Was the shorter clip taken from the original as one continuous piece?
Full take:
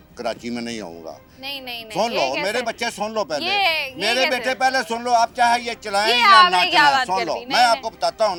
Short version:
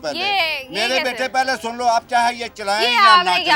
yes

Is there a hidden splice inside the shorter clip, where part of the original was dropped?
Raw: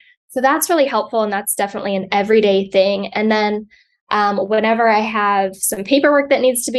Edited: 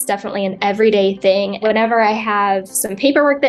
yes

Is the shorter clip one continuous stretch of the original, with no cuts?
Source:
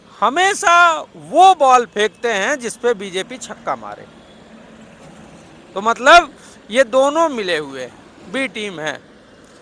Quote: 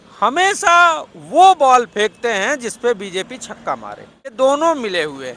no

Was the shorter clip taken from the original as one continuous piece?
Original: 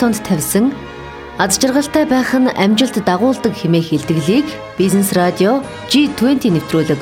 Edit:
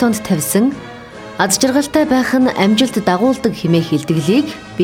yes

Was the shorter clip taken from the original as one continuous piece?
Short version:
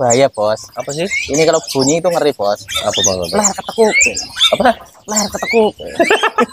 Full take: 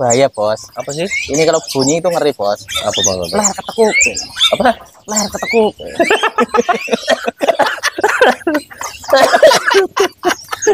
yes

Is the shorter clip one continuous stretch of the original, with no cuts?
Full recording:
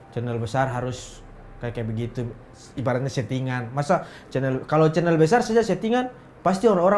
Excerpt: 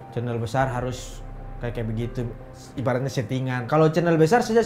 no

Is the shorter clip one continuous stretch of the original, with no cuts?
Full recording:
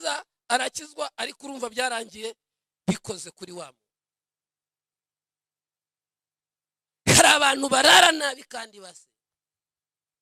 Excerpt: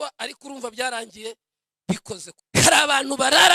no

